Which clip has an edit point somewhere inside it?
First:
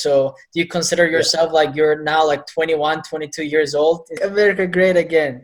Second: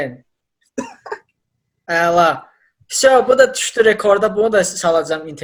first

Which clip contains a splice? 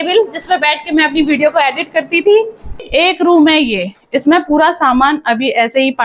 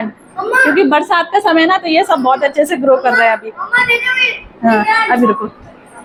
first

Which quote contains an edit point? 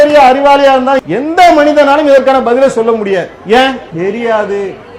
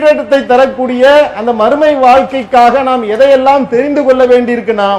first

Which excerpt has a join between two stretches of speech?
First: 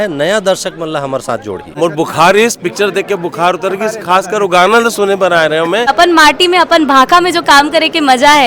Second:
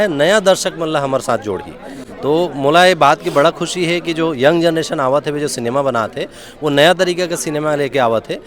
first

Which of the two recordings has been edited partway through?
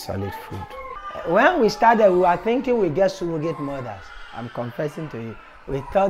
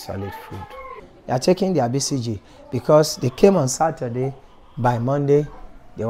first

